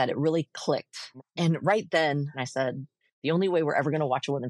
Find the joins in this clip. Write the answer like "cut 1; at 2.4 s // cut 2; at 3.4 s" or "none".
cut 1; at 1.2 s // cut 2; at 2.4 s